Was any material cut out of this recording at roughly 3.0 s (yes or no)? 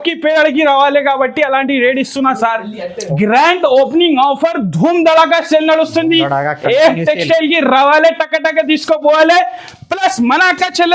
yes